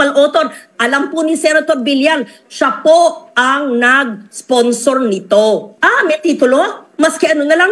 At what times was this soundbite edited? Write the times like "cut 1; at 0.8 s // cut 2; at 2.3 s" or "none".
cut 1; at 5.7 s